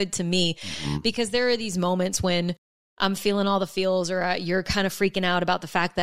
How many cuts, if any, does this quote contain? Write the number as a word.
zero